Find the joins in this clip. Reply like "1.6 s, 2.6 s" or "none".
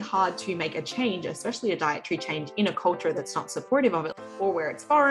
4.1 s